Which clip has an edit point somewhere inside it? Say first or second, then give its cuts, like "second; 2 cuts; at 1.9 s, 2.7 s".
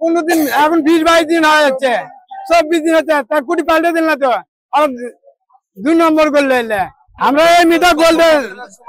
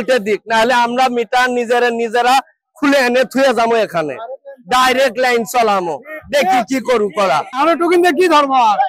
second; 1 cut; at 7.6 s